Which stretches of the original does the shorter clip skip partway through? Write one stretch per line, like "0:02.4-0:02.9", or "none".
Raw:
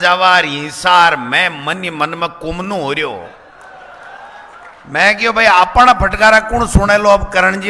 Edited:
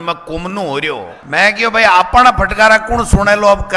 0:03.3-0:04.8